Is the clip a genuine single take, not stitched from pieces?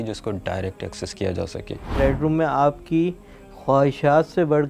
no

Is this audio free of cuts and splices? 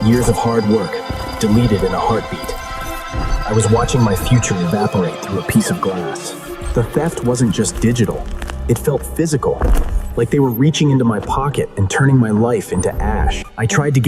no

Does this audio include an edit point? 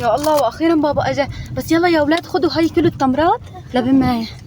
no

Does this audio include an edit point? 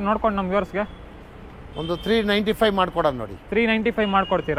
no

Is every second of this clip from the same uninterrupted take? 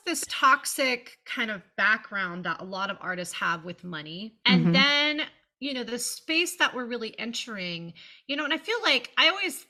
yes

